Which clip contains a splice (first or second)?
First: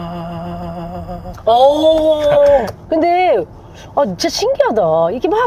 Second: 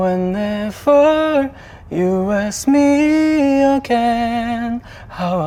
first